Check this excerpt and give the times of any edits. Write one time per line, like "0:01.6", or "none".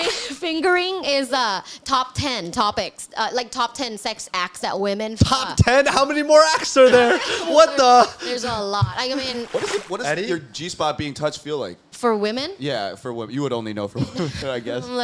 0:09.5
0:11.8